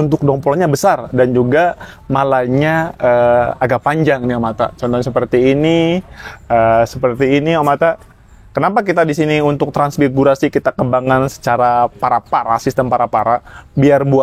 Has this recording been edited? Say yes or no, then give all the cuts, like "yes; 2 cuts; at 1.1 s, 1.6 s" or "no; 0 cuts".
no; 0 cuts